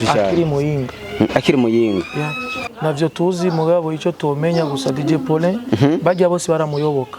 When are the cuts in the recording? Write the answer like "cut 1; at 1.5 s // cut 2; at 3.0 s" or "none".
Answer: cut 1; at 2.5 s